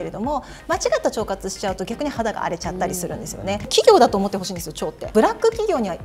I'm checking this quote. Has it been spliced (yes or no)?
yes